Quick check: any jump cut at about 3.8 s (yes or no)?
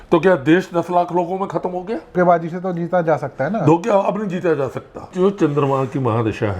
no